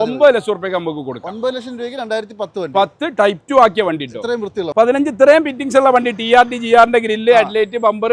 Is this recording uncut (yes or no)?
no